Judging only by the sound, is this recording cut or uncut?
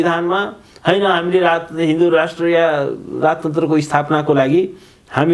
uncut